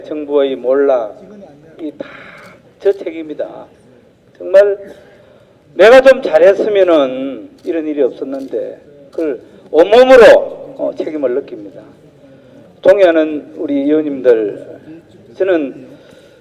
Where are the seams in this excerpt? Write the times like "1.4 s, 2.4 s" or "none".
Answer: 9.4 s